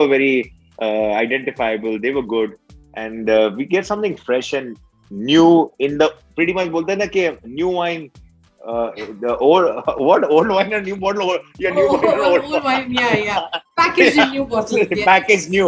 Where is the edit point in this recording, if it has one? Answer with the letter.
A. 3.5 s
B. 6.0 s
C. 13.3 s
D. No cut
D